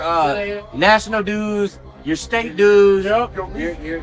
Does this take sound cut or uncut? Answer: uncut